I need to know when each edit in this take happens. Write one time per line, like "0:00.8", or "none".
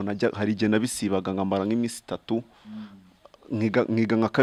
none